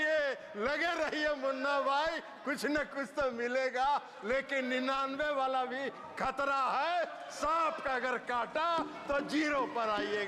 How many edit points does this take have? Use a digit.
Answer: 0